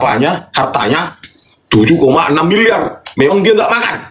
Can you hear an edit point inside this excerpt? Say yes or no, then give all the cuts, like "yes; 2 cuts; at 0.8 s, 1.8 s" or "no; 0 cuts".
no; 0 cuts